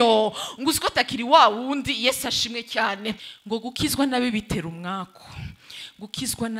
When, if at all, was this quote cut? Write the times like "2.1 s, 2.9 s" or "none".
3.3 s